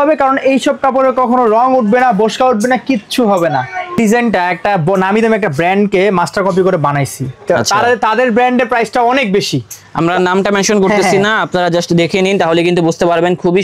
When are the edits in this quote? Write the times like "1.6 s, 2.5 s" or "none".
4.0 s